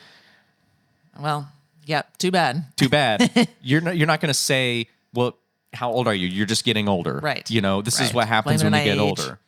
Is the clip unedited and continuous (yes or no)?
yes